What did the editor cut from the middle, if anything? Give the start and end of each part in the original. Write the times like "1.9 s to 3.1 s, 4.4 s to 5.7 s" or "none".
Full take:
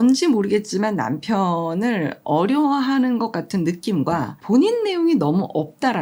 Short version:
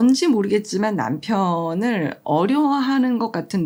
none

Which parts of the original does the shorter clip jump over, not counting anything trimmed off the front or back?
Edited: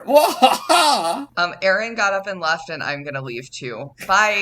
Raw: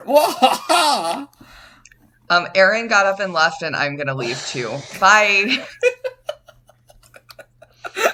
1.3 s to 2.2 s

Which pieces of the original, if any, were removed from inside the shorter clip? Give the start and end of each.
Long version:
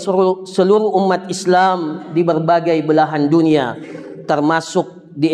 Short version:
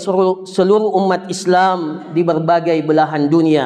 none

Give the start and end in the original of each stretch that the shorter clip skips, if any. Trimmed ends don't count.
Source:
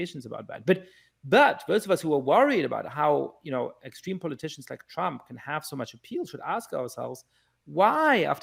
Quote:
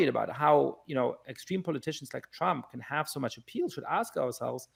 none

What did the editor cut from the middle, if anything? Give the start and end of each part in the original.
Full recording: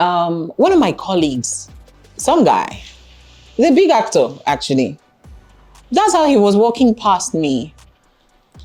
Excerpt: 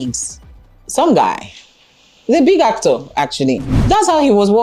5.0 s to 5.8 s

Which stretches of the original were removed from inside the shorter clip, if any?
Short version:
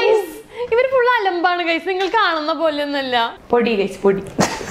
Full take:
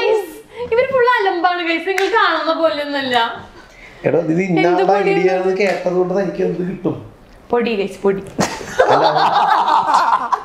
3.4 s to 7.4 s

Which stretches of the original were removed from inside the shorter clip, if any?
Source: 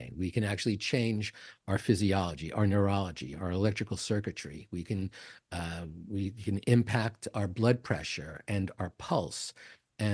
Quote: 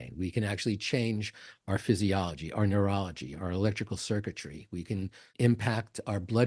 5.3 s to 6.6 s

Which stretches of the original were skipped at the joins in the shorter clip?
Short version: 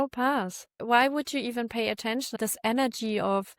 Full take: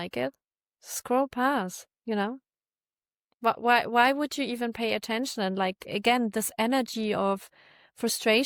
2.0 s to 3.9 s, 5.4 s to 6.3 s

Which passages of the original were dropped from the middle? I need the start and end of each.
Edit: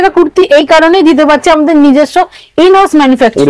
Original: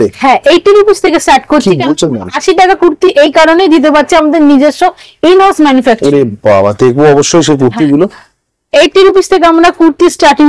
none

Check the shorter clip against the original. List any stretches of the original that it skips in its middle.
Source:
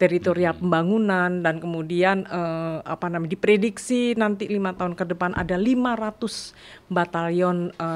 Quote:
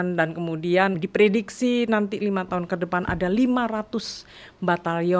2.3 s to 3.3 s

